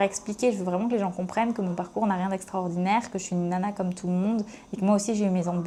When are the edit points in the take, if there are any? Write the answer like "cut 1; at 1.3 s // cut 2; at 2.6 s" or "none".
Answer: none